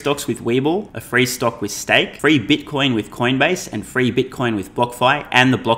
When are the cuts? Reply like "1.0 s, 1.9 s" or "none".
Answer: 1.0 s, 2.1 s